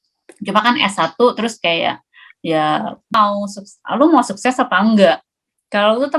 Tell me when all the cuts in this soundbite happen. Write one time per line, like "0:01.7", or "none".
0:03.1